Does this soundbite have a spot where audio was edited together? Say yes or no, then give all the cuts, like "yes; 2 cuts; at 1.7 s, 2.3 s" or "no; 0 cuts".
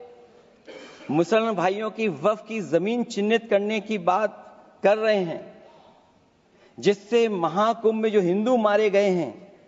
no; 0 cuts